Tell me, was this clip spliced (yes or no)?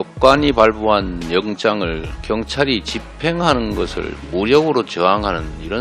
yes